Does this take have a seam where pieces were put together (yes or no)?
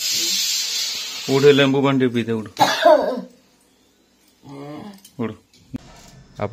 yes